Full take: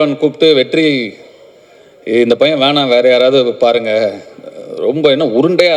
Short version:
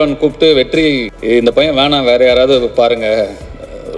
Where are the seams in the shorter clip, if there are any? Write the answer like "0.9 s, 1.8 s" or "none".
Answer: 1.1 s